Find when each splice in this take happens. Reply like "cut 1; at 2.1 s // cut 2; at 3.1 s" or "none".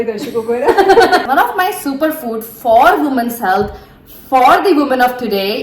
cut 1; at 1.2 s